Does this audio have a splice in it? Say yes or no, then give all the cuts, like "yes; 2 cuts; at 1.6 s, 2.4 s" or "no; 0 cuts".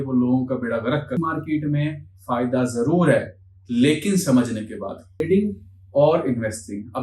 yes; 2 cuts; at 1.2 s, 5.2 s